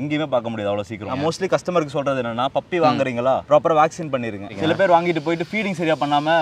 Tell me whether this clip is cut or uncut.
cut